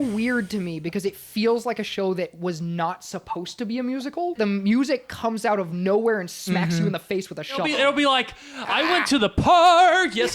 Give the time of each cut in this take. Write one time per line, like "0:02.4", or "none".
0:04.4
0:07.7